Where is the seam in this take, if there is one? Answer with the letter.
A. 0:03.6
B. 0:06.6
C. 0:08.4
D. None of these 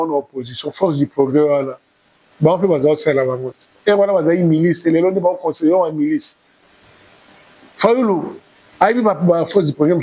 B